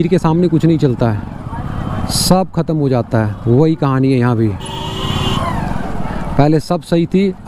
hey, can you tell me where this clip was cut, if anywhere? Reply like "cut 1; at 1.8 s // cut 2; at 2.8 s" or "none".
none